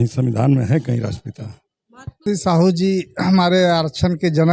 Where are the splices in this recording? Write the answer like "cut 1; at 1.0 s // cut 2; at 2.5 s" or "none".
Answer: cut 1; at 2.2 s